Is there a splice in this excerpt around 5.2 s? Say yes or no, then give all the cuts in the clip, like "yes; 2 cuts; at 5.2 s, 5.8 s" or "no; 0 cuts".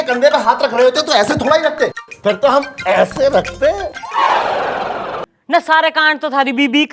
yes; 1 cut; at 5.2 s